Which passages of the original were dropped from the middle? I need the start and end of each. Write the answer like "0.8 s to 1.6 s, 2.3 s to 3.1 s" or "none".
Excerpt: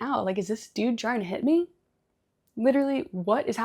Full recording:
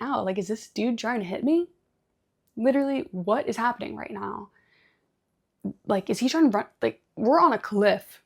none